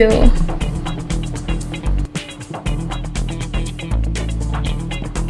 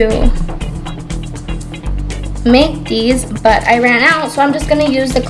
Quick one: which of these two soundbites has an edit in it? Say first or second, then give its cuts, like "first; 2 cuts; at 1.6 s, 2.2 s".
first; 1 cut; at 2.1 s